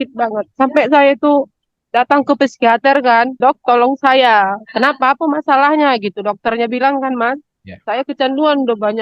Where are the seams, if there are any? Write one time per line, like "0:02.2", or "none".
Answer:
0:03.3